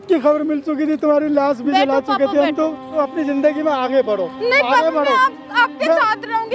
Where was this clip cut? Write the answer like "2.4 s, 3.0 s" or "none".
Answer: 3.0 s